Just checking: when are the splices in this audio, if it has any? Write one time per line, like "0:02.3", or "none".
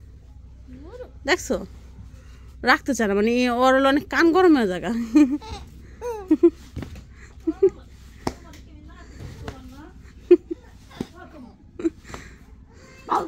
none